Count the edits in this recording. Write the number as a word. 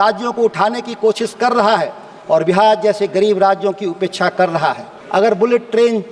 one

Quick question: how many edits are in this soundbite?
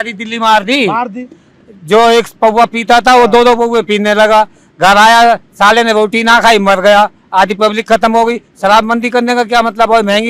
zero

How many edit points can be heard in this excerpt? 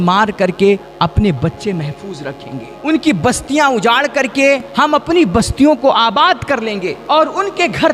four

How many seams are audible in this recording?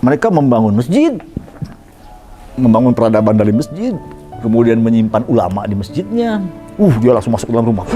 one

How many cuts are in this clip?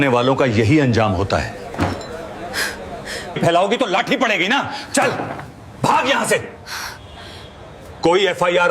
one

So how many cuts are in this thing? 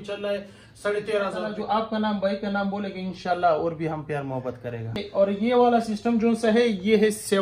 two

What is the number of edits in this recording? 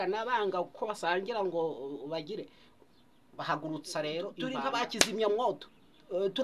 one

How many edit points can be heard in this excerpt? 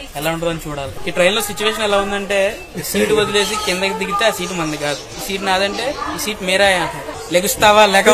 two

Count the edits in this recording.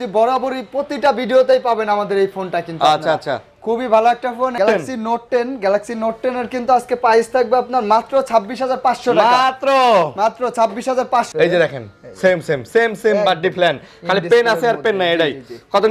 two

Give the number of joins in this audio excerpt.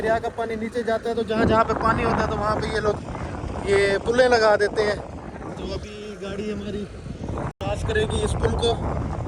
zero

